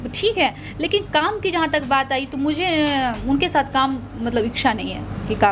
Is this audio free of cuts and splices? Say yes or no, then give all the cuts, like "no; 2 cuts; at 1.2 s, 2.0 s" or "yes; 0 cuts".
yes; 0 cuts